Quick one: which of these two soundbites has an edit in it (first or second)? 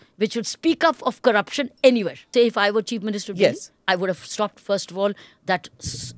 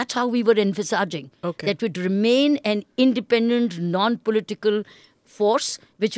first